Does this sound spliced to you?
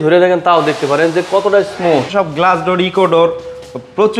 yes; 1 cut; at 2.1 s

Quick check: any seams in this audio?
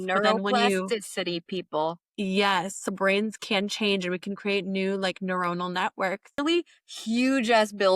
yes; 2 cuts; at 2.9 s, 6.4 s

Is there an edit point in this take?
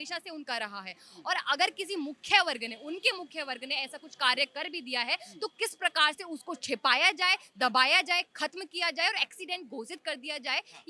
no; 0 cuts

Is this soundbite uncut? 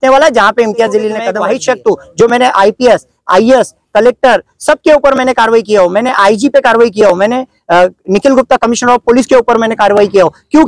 no; 1 cut; at 1.3 s

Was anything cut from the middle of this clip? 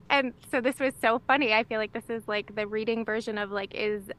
no; 0 cuts

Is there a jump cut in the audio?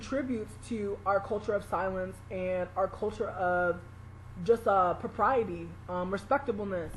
no; 0 cuts

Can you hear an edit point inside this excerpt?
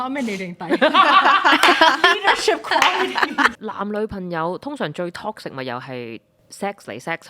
yes; 1 cut; at 3.5 s

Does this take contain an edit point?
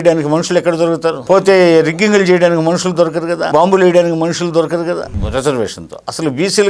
yes; 3 cuts; at 1.3 s, 3.4 s, 5.1 s

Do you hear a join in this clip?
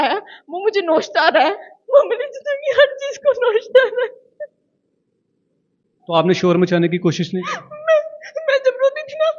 no; 0 cuts

